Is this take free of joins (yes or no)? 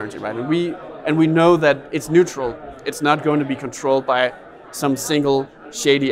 yes